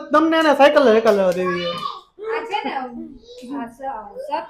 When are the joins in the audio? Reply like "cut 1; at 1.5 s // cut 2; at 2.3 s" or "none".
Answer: none

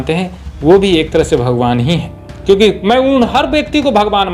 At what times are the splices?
none

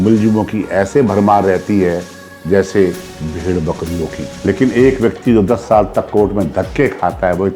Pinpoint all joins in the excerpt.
cut 1; at 4.3 s

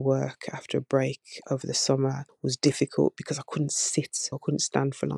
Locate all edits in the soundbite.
cut 1; at 2.3 s // cut 2; at 4.3 s

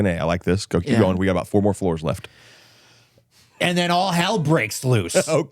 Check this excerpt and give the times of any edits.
none

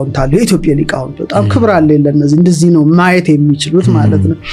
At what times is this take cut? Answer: none

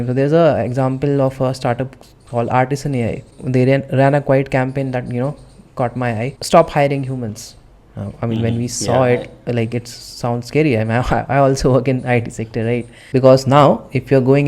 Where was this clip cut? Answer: cut 1; at 3.3 s // cut 2; at 6.3 s // cut 3; at 13.0 s

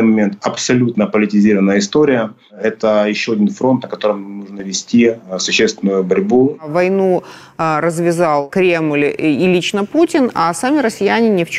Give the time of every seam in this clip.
cut 1; at 2.6 s // cut 2; at 6.7 s // cut 3; at 8.5 s

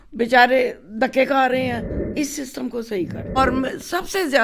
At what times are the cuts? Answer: cut 1; at 2.0 s // cut 2; at 3.4 s

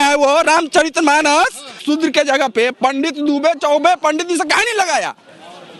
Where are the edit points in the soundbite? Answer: cut 1; at 1.8 s

